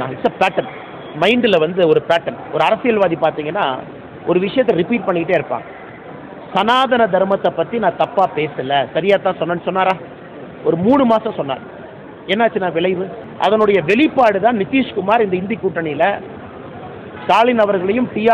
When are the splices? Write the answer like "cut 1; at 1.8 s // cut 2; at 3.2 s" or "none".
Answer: cut 1; at 13.2 s